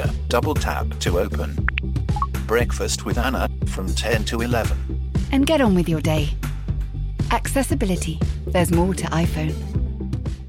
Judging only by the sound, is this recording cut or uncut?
uncut